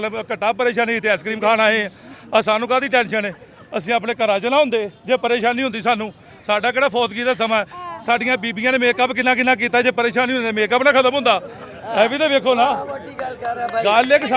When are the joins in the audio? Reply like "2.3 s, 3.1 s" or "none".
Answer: none